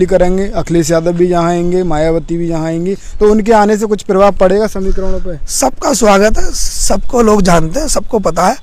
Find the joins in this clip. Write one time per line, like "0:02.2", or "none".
none